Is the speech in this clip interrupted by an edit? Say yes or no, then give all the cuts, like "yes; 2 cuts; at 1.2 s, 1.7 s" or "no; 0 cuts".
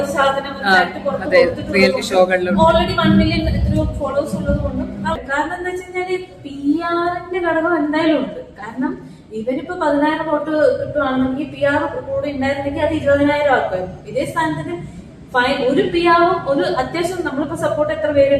yes; 1 cut; at 5.2 s